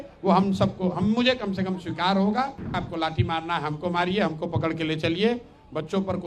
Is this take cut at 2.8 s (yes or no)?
yes